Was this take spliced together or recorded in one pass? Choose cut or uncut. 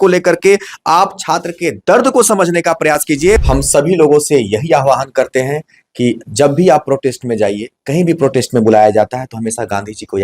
cut